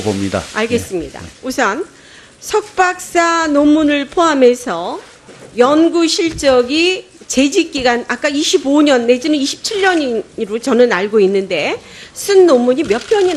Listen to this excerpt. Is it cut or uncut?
cut